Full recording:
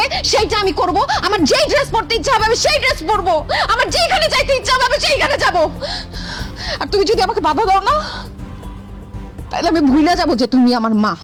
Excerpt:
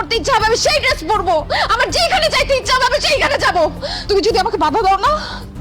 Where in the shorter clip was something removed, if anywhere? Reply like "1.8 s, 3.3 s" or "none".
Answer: 3.9 s